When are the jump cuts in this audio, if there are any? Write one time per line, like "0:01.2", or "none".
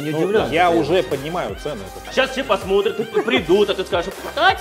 0:02.0